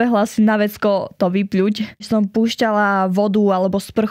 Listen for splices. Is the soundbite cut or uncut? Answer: cut